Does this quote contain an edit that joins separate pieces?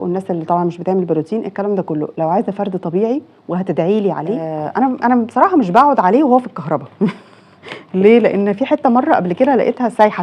yes; 1 cut; at 4.5 s

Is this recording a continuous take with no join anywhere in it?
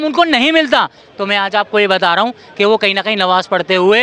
yes; 0 cuts

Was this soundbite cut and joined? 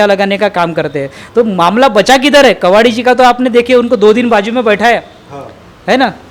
no; 0 cuts

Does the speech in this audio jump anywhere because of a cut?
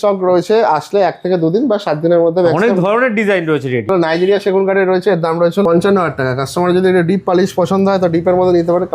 yes; 2 cuts; at 3.9 s, 5.6 s

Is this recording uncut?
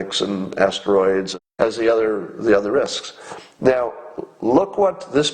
no; 1 cut; at 1.4 s

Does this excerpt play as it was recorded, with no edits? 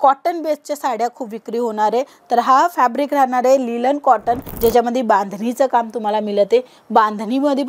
no; 1 cut; at 4.5 s

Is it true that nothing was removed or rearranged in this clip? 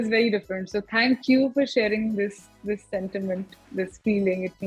yes; 0 cuts

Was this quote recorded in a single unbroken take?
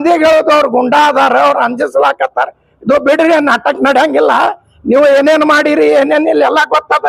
yes; 0 cuts

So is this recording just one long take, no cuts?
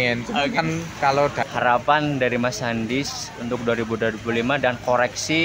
no; 1 cut; at 1.5 s

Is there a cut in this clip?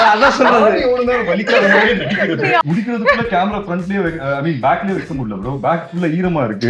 yes; 1 cut; at 2.6 s

